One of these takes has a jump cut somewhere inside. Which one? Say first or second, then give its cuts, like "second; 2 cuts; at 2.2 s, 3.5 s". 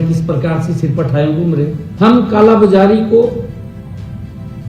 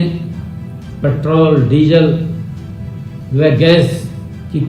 first; 1 cut; at 1.8 s